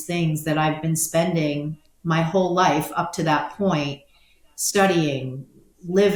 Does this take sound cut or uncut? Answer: uncut